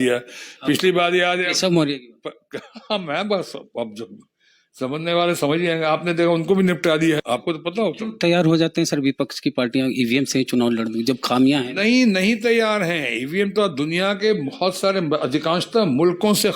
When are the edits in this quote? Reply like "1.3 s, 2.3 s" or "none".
7.2 s